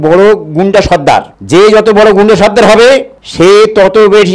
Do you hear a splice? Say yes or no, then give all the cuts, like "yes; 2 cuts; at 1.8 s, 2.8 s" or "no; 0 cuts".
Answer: no; 0 cuts